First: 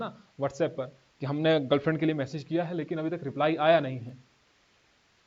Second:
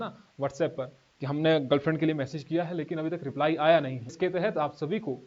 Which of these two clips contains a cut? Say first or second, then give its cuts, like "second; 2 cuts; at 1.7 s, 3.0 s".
second; 1 cut; at 4.1 s